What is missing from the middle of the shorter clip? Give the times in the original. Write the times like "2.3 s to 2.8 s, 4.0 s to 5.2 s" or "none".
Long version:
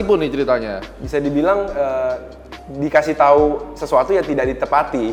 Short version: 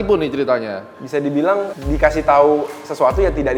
1.7 s to 2.6 s